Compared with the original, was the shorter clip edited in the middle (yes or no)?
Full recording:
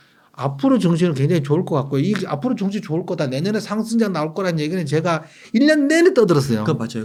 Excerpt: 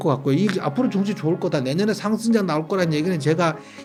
no